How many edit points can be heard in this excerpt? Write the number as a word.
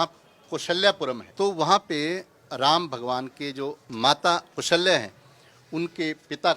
two